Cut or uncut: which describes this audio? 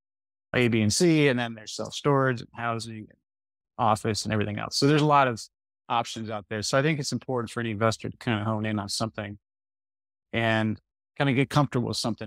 cut